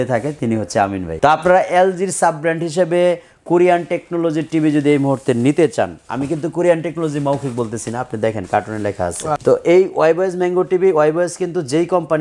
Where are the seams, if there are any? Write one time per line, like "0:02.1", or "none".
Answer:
0:01.0
0:09.4